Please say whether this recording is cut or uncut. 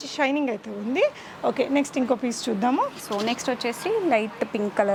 uncut